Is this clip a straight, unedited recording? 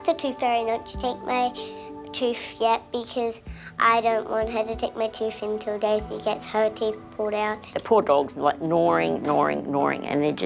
no; 1 cut; at 7.7 s

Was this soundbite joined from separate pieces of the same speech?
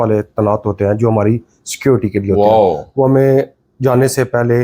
no; 0 cuts

